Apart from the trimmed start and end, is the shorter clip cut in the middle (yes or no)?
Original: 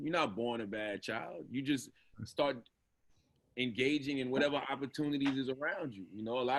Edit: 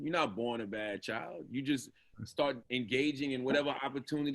yes